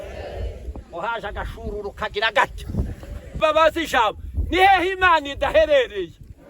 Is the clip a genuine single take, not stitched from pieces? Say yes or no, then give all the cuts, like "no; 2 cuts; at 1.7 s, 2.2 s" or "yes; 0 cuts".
no; 1 cut; at 3.4 s